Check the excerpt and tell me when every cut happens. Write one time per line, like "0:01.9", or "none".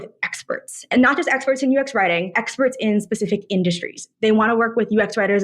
0:00.9